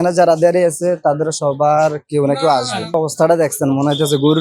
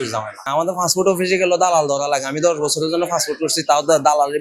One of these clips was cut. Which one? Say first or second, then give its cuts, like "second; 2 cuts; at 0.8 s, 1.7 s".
first; 1 cut; at 3.0 s